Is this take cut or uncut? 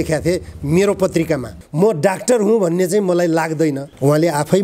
cut